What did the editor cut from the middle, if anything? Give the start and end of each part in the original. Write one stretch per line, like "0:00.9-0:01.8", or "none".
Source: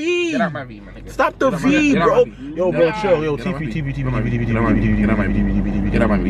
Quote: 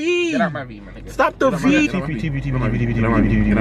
0:01.9-0:03.4